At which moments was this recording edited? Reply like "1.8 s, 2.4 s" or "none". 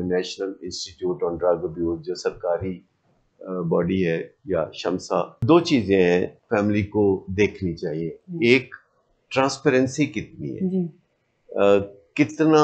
5.4 s, 6.4 s